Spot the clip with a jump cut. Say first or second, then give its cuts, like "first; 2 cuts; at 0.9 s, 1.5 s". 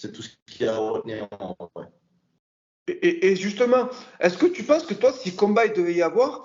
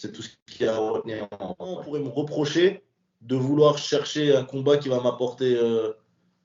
second; 1 cut; at 1.8 s